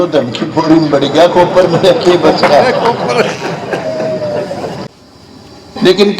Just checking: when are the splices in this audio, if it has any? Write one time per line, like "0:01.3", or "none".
0:04.9